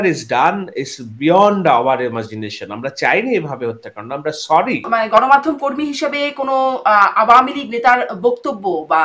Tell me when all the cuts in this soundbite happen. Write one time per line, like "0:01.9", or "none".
0:04.9